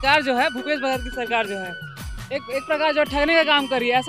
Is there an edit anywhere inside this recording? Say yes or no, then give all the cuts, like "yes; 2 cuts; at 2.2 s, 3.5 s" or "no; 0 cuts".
no; 0 cuts